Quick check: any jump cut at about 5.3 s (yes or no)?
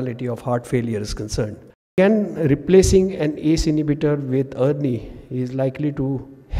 no